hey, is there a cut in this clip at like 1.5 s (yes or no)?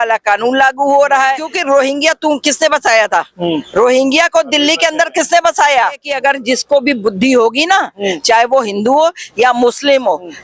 yes